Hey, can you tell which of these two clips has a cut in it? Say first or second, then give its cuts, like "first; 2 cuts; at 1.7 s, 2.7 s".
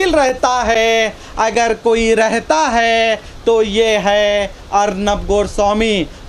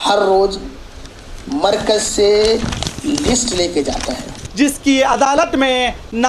second; 1 cut; at 4.4 s